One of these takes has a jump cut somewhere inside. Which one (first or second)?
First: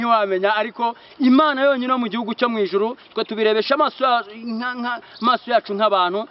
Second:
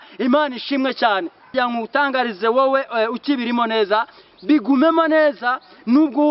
second